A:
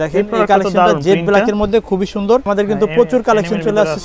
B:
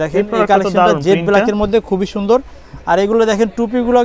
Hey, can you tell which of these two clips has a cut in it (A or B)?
A